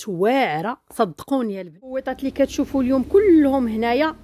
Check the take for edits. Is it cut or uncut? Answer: cut